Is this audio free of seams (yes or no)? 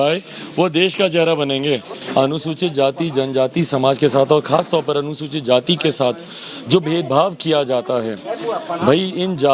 no